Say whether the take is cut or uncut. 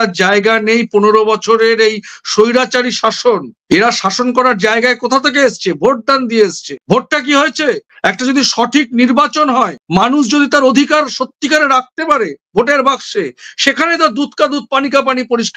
uncut